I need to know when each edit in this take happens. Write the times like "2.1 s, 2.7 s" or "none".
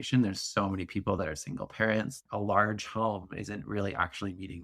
1.2 s, 2.2 s